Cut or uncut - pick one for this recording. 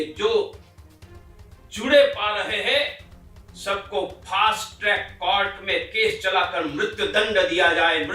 uncut